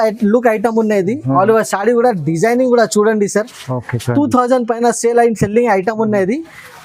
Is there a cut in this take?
no; 0 cuts

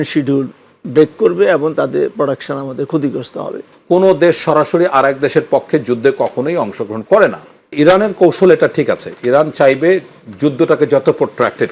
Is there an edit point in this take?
yes; 2 cuts; at 3.7 s, 7.7 s

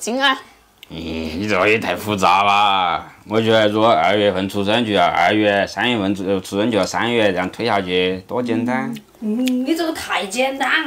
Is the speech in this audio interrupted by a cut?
no; 0 cuts

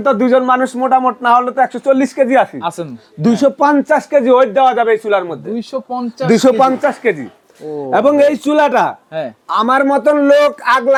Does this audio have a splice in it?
no; 0 cuts

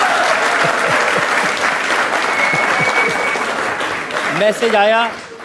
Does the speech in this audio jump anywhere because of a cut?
no; 0 cuts

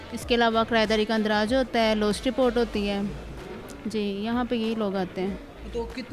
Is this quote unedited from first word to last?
yes; 0 cuts

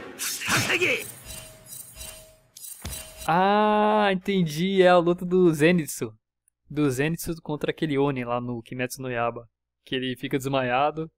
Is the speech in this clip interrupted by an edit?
yes; 1 cut; at 0.9 s

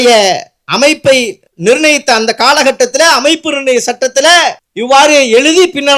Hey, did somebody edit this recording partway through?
yes; 2 cuts; at 1.4 s, 4.7 s

